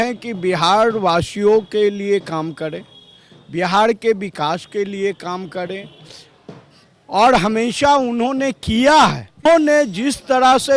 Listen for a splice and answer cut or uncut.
cut